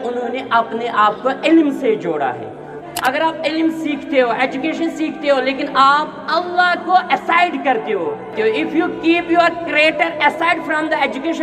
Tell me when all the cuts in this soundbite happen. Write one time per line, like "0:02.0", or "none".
0:02.8